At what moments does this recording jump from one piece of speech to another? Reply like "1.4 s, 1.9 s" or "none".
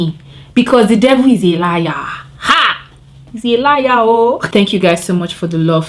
4.4 s